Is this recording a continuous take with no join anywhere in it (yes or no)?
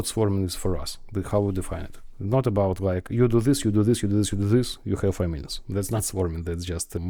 yes